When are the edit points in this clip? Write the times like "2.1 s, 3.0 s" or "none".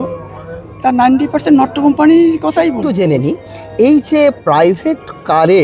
2.8 s